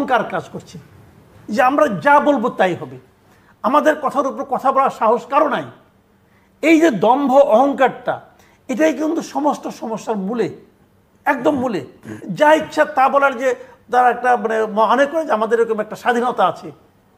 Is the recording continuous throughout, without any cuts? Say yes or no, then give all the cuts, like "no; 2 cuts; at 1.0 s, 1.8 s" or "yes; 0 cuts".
yes; 0 cuts